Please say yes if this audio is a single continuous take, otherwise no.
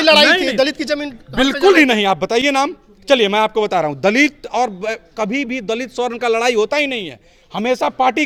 yes